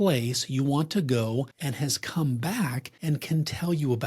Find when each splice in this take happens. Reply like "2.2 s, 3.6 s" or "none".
1.6 s, 2.9 s